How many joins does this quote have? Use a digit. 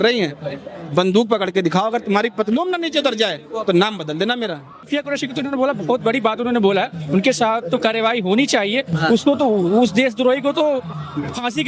1